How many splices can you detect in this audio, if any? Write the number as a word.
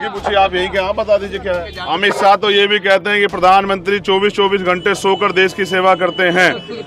one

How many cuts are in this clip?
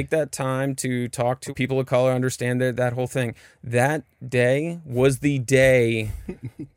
one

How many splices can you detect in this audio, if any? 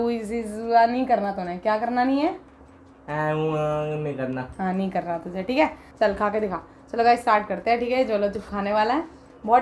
one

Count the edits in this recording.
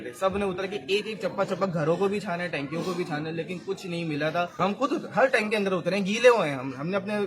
one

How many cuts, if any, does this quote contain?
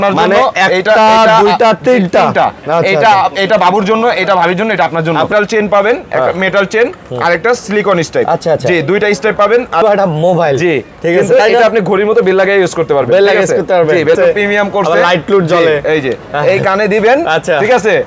three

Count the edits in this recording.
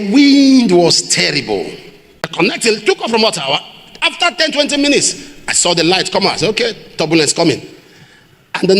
one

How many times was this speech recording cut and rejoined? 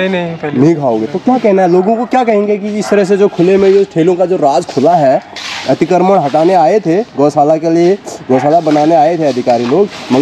zero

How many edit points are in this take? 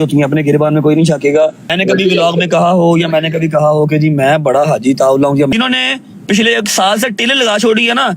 two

